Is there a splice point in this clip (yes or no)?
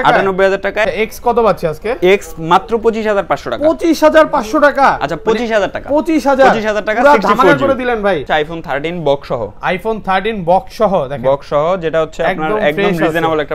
yes